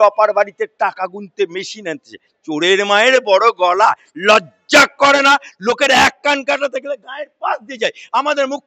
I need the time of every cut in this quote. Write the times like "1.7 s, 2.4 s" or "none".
none